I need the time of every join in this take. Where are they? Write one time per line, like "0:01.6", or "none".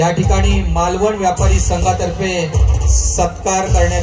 none

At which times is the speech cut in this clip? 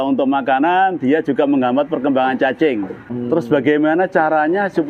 0:03.0

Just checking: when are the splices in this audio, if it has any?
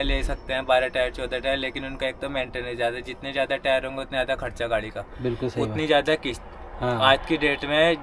none

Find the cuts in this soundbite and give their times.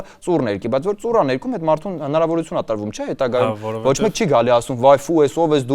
none

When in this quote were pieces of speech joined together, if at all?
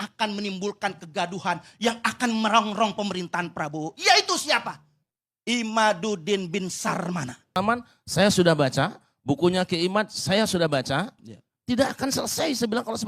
0:07.6

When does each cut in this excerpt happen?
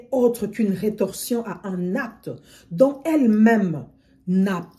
none

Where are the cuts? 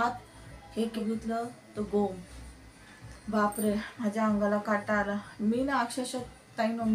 0:01.1

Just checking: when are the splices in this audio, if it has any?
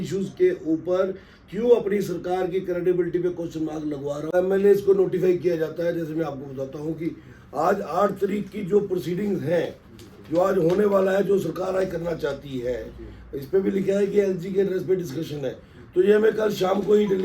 0:04.3

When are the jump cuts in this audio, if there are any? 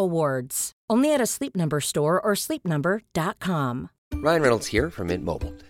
none

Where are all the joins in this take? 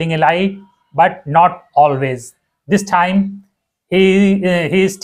none

